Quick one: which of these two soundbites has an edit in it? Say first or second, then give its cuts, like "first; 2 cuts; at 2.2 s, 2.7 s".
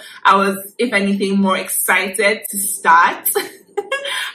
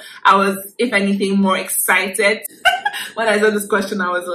second; 1 cut; at 2.5 s